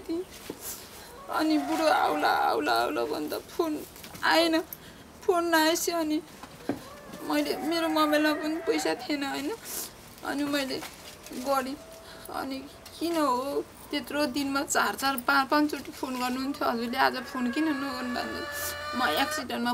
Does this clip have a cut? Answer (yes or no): no